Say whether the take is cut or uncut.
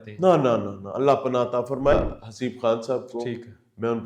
cut